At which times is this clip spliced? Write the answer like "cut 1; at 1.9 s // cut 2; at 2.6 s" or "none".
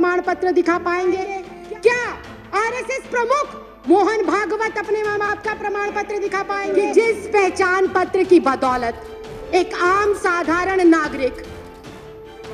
cut 1; at 1.5 s // cut 2; at 6.7 s